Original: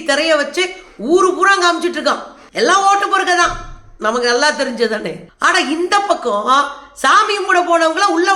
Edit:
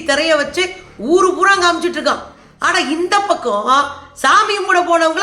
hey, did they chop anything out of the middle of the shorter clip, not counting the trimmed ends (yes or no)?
yes